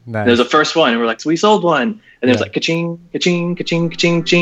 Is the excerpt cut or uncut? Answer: cut